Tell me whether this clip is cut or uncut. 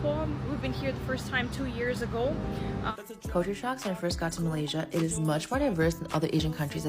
cut